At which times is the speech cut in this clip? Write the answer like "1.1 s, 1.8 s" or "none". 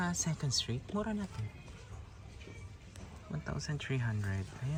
none